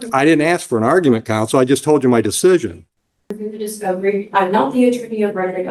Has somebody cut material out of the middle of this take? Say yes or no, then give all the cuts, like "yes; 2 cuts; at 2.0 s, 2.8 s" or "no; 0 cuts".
yes; 1 cut; at 3.4 s